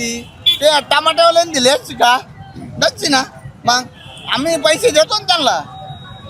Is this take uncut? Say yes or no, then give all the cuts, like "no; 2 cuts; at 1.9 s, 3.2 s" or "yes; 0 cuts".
yes; 0 cuts